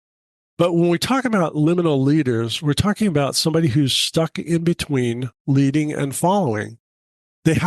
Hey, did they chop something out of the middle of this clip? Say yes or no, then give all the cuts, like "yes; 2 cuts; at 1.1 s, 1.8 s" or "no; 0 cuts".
no; 0 cuts